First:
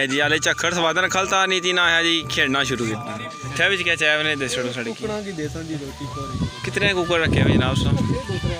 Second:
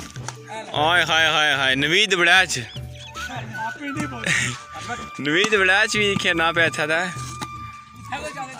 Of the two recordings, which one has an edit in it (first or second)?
first